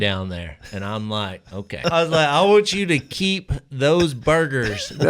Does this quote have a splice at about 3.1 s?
no; 1 cut; at 1.8 s

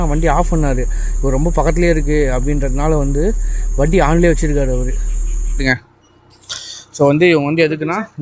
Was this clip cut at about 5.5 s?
yes; 1 cut; at 5.5 s

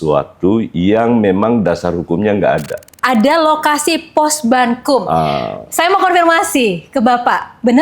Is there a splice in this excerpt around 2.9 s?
yes; 1 cut; at 2.9 s

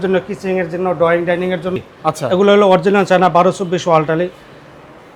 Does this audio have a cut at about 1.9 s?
yes; 1 cut; at 1.9 s

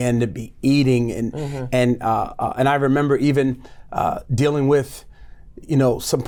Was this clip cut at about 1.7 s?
no; 0 cuts

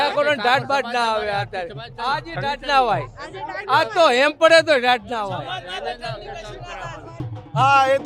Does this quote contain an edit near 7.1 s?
yes; 1 cut; at 7.1 s

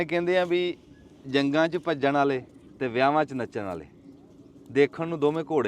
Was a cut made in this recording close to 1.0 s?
no; 1 cut; at 2.6 s

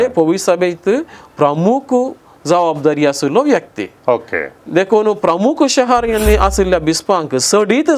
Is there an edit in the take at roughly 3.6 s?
no; 0 cuts

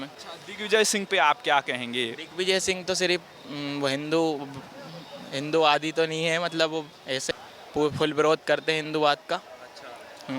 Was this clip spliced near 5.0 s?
no; 1 cut; at 7.3 s

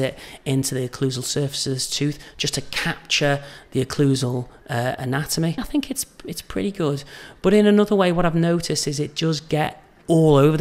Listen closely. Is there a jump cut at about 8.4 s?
no; 1 cut; at 5.6 s

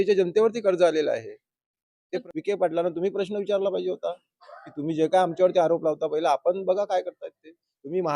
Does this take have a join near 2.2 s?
yes; 1 cut; at 2.2 s

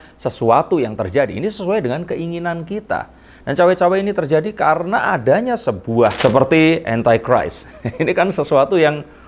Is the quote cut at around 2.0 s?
no; 1 cut; at 6.2 s

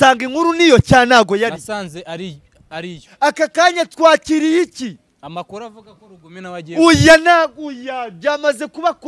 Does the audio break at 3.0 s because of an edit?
yes; 1 cut; at 3.0 s

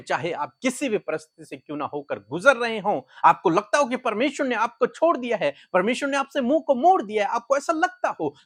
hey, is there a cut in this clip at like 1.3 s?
no; 0 cuts

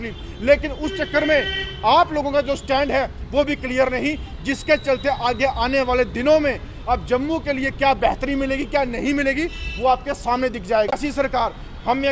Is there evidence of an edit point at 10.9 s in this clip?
yes; 1 cut; at 10.9 s

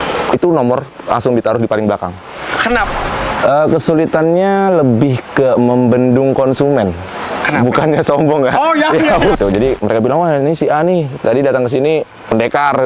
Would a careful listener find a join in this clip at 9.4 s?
yes; 2 cuts; at 2.9 s, 9.4 s

